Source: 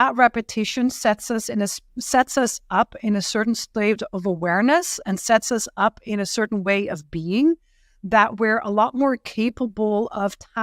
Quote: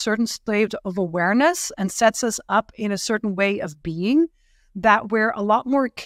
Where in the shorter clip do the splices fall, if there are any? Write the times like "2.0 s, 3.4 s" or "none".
none